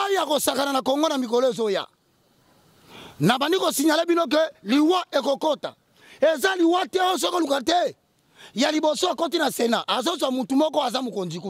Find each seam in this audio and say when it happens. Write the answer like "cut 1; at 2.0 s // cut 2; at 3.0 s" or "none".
none